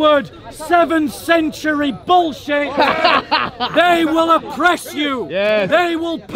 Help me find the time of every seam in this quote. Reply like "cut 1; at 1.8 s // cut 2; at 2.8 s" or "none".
none